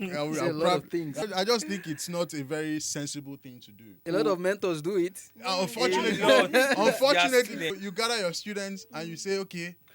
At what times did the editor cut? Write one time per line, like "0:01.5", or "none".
0:01.2
0:03.9
0:07.7